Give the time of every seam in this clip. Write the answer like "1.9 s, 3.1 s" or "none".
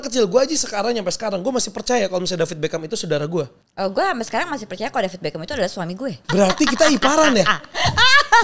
3.6 s, 6.2 s